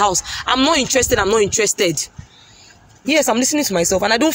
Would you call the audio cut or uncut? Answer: cut